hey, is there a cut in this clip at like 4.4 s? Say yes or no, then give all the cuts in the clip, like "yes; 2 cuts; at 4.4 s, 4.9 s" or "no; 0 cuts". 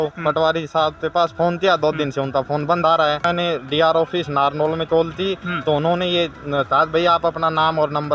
no; 1 cut; at 3.2 s